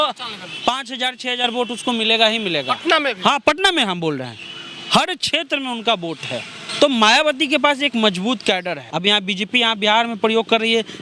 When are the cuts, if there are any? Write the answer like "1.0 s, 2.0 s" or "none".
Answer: 8.8 s